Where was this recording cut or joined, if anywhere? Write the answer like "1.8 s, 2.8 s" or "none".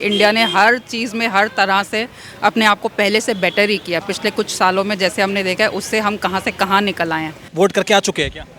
7.4 s